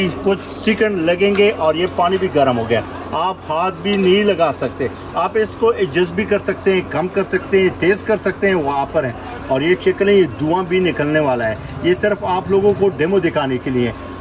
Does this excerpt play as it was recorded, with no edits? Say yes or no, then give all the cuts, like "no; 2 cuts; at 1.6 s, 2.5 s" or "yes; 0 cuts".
yes; 0 cuts